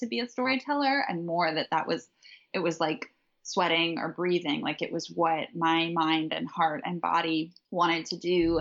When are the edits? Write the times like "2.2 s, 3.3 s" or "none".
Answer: 7.6 s